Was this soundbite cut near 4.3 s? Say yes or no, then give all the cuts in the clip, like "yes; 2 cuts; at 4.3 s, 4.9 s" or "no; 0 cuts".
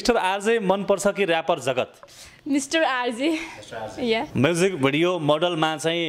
yes; 1 cut; at 4.3 s